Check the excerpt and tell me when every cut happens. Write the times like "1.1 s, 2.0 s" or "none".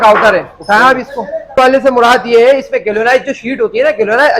1.6 s